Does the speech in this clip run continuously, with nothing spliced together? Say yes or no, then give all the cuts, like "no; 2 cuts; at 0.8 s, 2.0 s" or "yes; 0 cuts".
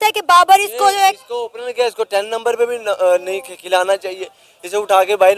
yes; 0 cuts